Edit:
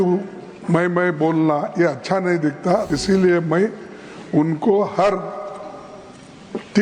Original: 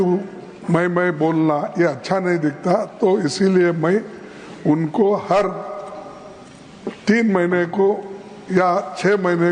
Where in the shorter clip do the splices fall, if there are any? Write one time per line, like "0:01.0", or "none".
0:02.9